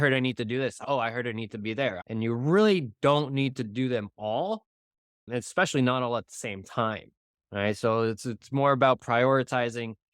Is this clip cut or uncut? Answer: cut